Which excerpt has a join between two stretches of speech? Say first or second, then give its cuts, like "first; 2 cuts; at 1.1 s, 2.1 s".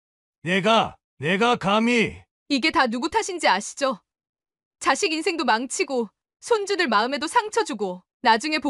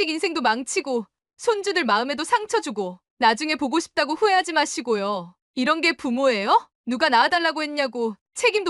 second; 1 cut; at 6.7 s